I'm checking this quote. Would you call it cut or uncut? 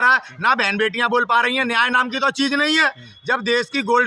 uncut